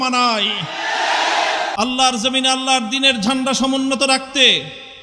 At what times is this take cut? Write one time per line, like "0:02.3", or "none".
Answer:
0:01.7